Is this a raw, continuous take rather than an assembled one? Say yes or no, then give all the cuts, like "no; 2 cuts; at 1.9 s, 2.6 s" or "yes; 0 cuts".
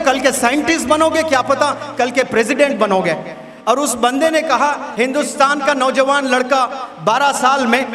yes; 0 cuts